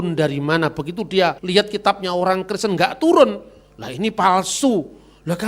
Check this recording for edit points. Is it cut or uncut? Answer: cut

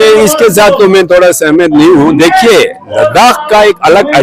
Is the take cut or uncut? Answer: uncut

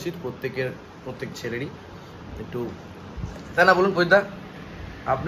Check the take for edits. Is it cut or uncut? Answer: uncut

